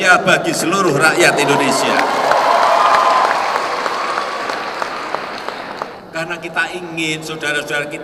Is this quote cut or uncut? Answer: cut